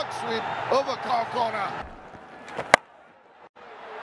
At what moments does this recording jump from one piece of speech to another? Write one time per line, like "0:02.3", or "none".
0:01.8